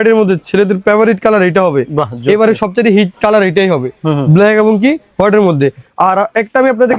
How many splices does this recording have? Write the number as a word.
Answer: zero